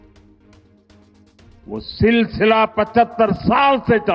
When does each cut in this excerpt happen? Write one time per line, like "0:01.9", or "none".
0:01.5

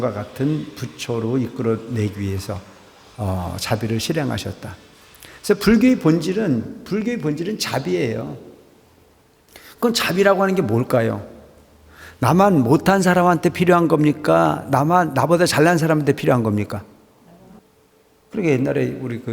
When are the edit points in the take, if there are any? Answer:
0:17.6

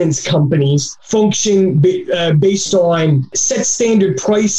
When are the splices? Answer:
0:00.9

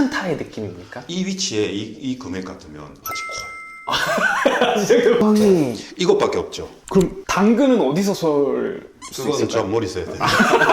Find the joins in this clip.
0:05.2

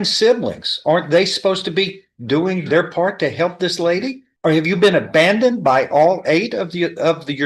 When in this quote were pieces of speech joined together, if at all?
0:04.2

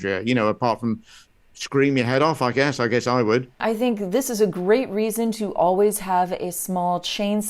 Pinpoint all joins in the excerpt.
0:03.6

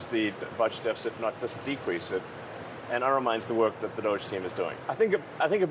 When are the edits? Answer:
0:04.8

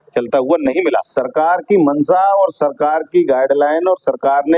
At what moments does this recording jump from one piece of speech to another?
0:01.1

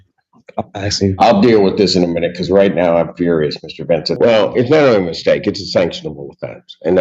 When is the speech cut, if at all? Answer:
0:04.1

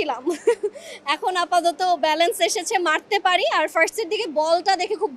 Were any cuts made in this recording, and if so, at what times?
none

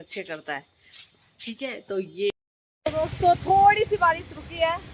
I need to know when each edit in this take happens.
0:02.3

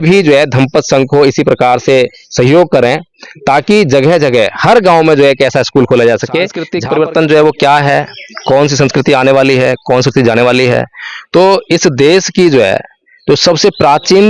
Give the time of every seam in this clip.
0:06.7

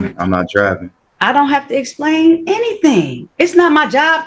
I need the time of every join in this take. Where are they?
0:00.9

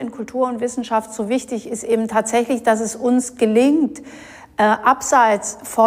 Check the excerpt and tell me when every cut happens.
none

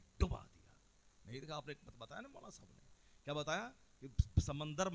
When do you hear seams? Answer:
none

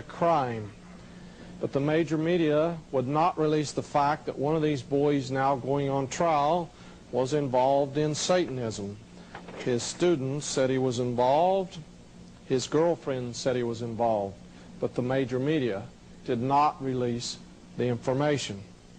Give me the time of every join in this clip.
0:14.4

